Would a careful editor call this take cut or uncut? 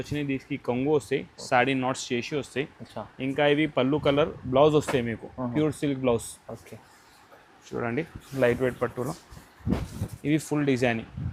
uncut